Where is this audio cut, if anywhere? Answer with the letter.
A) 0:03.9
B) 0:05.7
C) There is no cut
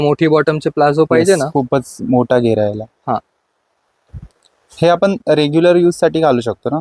C